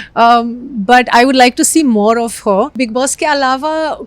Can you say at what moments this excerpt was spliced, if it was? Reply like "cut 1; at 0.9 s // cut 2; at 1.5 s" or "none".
cut 1; at 2.7 s